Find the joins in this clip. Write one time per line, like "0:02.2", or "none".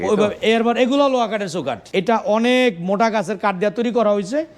0:01.7